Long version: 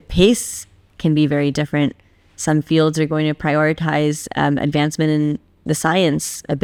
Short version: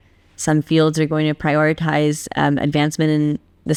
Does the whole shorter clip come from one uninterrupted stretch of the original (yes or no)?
yes